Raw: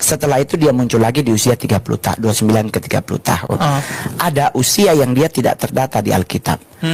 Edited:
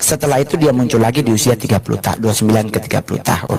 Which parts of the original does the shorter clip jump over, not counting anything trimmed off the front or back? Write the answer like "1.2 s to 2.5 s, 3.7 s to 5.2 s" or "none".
none